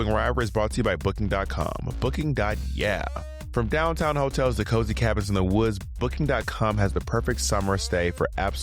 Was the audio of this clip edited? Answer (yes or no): no